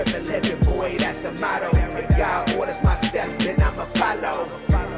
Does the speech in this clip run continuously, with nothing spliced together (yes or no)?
yes